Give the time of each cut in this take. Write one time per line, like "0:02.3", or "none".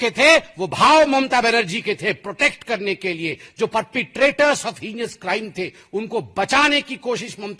none